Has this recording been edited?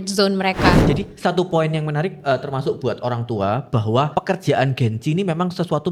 yes; 2 cuts; at 0.8 s, 4.1 s

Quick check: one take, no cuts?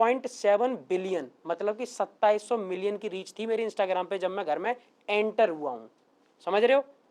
yes; 0 cuts

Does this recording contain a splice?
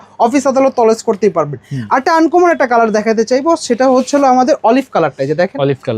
no; 0 cuts

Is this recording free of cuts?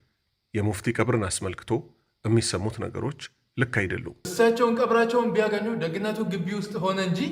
no; 1 cut; at 4.3 s

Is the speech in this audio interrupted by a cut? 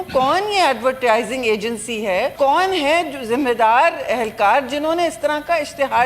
yes; 1 cut; at 2.3 s

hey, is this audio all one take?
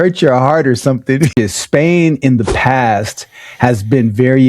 no; 1 cut; at 1.3 s

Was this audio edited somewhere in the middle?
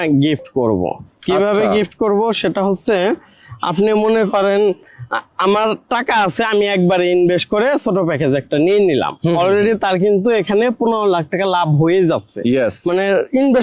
no; 0 cuts

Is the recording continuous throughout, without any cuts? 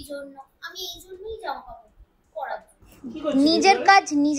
no; 1 cut; at 2.8 s

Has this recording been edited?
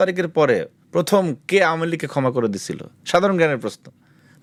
no; 0 cuts

